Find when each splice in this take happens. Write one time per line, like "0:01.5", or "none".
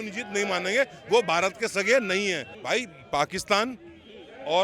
0:02.5